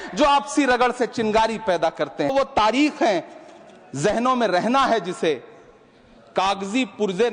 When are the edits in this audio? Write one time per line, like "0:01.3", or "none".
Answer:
0:02.3